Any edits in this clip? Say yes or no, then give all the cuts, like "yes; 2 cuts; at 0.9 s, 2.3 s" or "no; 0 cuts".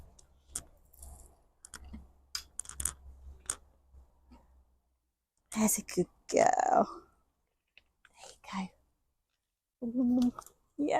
no; 0 cuts